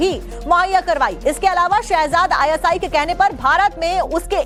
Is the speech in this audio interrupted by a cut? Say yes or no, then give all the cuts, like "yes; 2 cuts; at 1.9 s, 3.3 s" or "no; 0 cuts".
no; 0 cuts